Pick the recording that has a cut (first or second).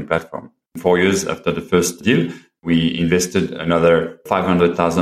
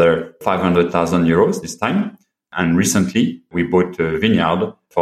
first